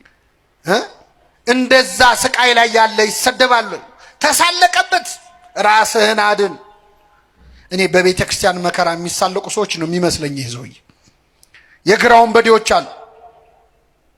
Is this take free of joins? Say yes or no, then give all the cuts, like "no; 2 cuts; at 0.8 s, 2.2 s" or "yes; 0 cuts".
yes; 0 cuts